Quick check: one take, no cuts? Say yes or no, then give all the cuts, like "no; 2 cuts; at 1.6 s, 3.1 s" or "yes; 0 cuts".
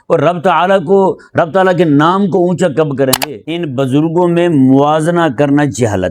no; 1 cut; at 3.2 s